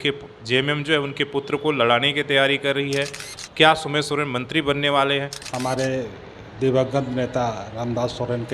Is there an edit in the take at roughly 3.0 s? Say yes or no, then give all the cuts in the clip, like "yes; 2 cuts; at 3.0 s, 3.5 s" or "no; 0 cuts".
no; 1 cut; at 5.4 s